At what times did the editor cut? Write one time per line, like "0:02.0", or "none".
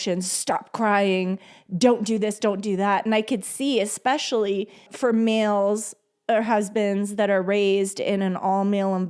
0:04.9